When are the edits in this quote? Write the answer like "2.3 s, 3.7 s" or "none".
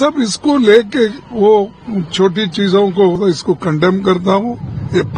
3.2 s